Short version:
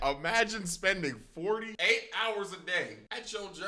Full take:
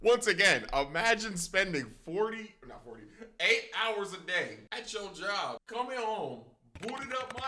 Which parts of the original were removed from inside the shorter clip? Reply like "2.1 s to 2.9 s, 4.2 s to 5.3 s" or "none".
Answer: 2.4 s to 3.3 s